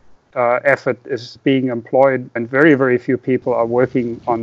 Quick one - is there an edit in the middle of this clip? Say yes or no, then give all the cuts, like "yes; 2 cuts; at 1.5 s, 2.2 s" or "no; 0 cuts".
yes; 2 cuts; at 1.3 s, 2.4 s